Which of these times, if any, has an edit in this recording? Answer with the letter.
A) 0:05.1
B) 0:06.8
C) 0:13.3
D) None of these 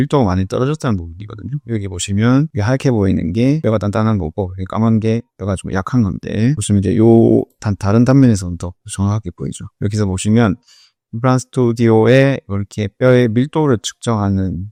D